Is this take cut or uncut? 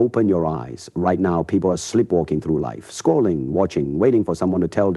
uncut